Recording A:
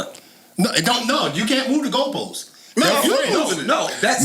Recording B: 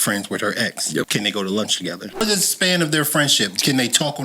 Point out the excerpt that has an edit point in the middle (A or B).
B